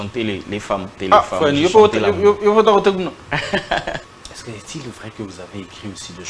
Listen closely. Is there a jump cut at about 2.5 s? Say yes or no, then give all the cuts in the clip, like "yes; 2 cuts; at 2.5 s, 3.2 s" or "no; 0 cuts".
no; 2 cuts; at 1.0 s, 4.0 s